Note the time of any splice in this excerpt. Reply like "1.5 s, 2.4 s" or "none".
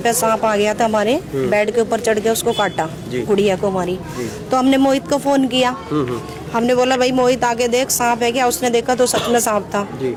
none